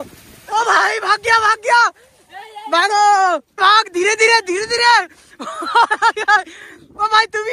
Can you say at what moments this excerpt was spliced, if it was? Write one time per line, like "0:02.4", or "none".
0:03.6